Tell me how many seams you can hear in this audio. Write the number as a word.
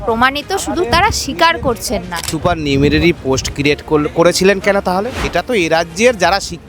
two